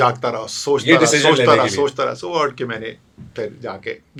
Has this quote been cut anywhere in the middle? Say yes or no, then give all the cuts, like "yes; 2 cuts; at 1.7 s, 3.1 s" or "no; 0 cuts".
no; 0 cuts